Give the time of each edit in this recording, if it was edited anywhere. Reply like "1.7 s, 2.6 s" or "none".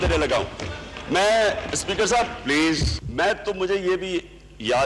3.0 s

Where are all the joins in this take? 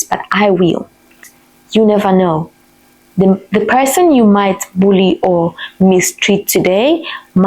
1.2 s

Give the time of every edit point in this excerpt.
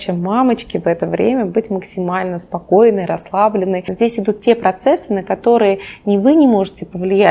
3.9 s

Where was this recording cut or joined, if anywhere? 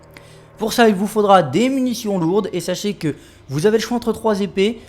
2.6 s

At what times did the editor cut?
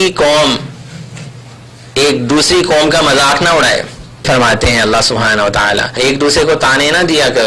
4.2 s, 6.0 s

